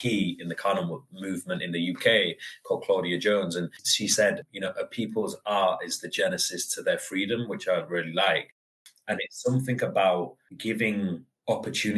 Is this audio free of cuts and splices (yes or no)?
no